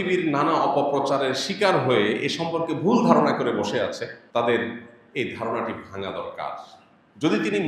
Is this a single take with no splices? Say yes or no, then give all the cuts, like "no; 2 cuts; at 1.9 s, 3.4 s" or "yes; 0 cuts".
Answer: no; 1 cut; at 4.1 s